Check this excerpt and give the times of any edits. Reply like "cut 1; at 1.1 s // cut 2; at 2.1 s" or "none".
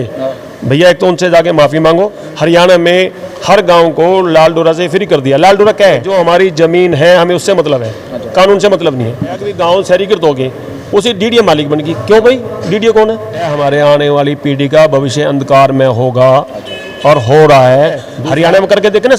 cut 1; at 2.2 s // cut 2; at 6.1 s // cut 3; at 9.5 s // cut 4; at 13.6 s // cut 5; at 18.1 s